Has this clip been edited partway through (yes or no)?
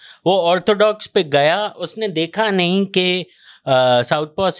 no